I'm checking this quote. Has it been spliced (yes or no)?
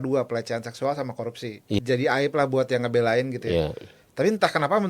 yes